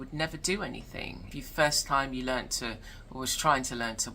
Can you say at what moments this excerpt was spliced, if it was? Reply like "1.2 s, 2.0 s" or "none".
1.3 s